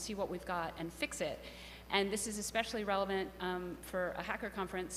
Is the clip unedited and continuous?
yes; 0 cuts

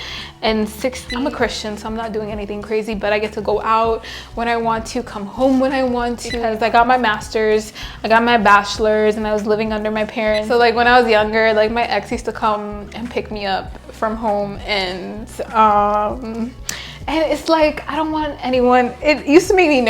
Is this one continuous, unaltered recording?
no; 3 cuts; at 1.0 s, 6.4 s, 10.4 s

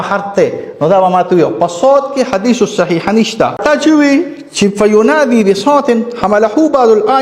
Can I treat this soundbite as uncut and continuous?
no; 1 cut; at 3.6 s

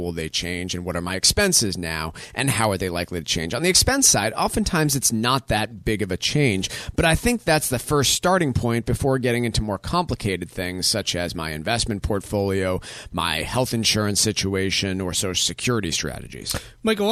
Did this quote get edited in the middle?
no; 0 cuts

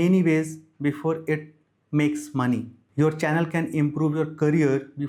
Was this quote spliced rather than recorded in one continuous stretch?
no; 0 cuts

